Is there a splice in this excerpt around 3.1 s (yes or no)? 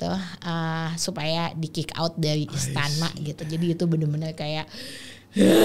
no